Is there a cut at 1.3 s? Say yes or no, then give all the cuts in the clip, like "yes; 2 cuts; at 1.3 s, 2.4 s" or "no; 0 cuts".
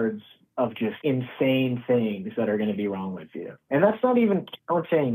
no; 1 cut; at 3.6 s